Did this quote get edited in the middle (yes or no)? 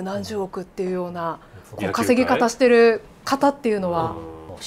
no